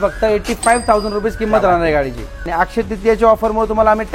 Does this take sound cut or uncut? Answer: cut